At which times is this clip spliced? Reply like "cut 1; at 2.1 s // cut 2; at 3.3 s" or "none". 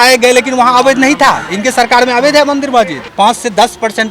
cut 1; at 3.0 s

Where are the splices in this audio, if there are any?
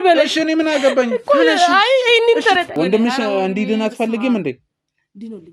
cut 1; at 2.7 s

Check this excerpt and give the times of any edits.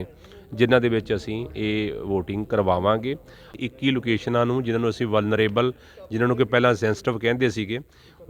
cut 1; at 3.5 s

